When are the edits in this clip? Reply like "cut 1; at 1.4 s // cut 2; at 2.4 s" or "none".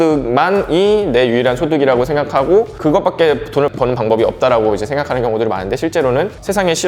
cut 1; at 3.7 s